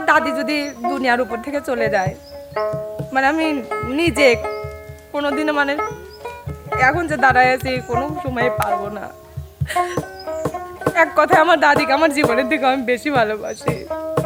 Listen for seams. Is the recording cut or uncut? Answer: uncut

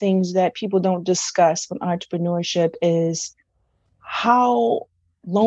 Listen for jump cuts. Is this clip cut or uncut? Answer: uncut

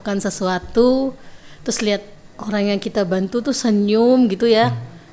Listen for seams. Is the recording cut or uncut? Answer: uncut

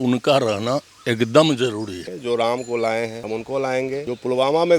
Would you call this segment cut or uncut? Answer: cut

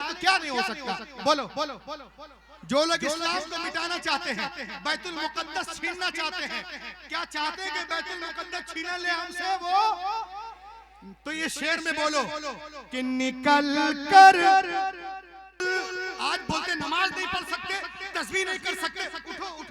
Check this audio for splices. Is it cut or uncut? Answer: cut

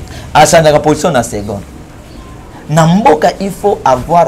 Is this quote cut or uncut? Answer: uncut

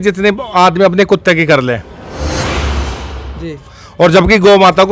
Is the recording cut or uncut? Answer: uncut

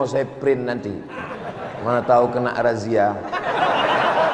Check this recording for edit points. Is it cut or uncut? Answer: uncut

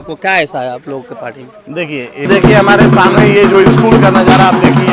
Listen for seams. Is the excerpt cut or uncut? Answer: cut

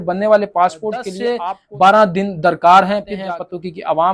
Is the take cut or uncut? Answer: cut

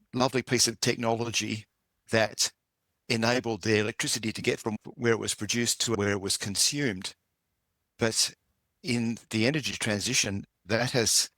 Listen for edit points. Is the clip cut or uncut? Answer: cut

